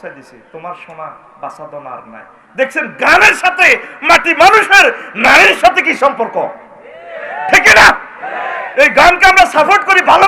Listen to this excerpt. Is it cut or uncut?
uncut